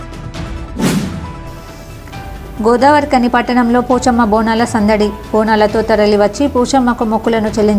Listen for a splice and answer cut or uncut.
uncut